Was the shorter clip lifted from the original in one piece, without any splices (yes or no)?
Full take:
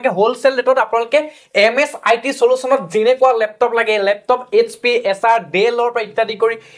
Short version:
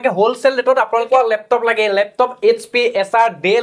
no